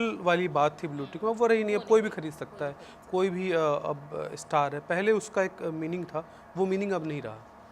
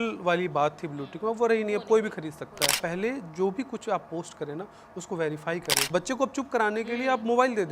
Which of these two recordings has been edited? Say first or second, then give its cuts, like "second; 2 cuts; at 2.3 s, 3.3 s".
second; 2 cuts; at 2.7 s, 5.7 s